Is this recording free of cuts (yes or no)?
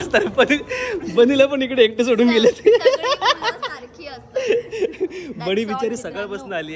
yes